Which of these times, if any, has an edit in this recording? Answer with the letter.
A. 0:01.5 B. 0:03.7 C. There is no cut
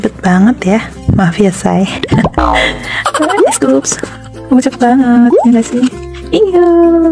C